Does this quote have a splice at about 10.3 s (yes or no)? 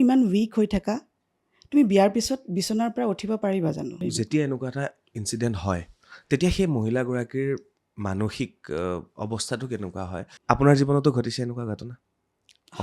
yes